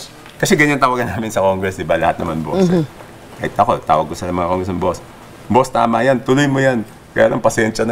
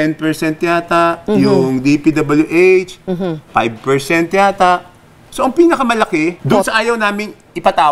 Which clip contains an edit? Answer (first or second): second